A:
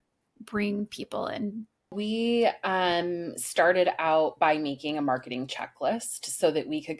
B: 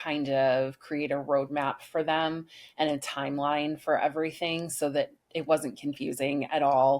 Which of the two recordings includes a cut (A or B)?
A